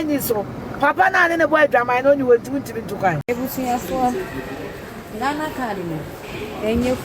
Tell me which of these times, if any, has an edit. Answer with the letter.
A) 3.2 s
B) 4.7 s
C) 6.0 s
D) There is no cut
A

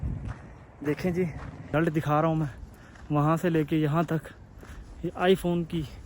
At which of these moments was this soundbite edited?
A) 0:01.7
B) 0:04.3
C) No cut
A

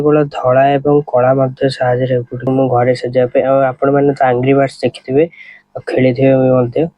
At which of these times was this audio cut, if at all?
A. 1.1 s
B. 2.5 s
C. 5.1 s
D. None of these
B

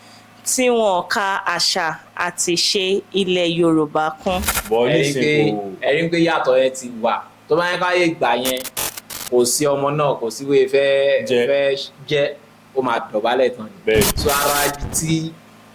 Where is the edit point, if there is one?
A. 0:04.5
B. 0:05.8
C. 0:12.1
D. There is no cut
A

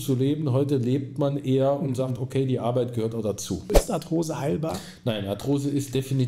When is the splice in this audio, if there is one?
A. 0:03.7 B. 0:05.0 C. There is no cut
A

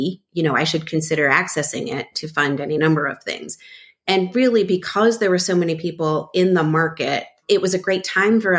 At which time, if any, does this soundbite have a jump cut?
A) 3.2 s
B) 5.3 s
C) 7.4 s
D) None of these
C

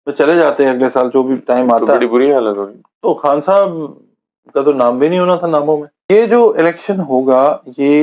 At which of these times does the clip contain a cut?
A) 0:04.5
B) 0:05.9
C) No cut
B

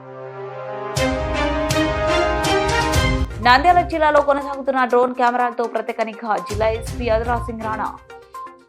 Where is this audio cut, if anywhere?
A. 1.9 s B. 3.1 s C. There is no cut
B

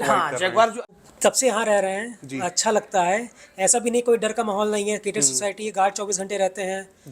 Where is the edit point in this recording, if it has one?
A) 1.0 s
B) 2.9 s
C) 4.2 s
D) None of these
A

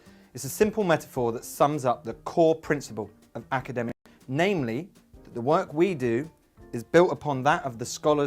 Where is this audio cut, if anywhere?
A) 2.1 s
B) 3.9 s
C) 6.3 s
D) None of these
B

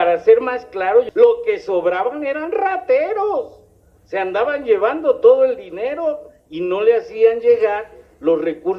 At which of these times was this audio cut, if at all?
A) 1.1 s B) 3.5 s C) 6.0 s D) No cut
A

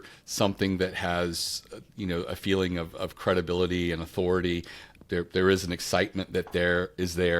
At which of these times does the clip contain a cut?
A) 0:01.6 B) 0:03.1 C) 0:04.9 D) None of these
C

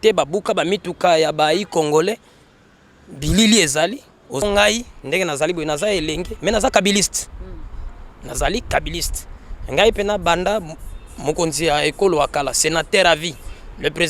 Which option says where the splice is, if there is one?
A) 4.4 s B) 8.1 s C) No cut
A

